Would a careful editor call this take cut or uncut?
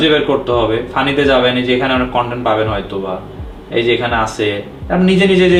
uncut